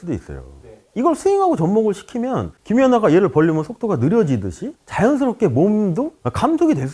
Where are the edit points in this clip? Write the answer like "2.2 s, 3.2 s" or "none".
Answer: 2.5 s